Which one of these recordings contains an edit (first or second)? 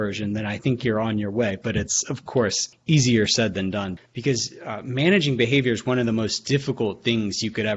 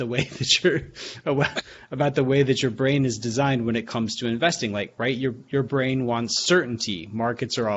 first